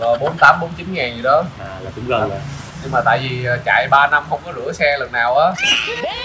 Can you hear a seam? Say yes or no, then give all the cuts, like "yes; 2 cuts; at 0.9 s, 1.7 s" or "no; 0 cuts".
no; 0 cuts